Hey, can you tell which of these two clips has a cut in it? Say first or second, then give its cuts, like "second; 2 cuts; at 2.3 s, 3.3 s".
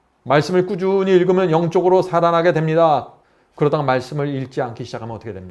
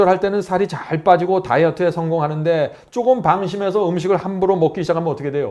first; 1 cut; at 3.2 s